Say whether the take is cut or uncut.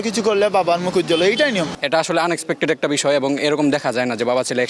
cut